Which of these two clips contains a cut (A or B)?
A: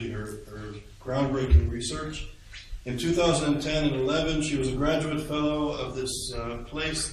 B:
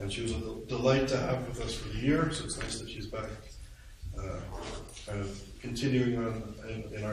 A